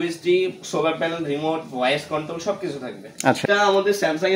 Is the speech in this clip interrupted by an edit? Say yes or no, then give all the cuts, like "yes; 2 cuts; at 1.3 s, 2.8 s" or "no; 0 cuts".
yes; 1 cut; at 3.4 s